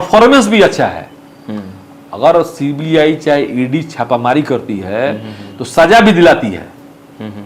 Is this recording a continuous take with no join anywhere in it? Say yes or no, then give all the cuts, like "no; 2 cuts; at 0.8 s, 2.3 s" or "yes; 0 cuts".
yes; 0 cuts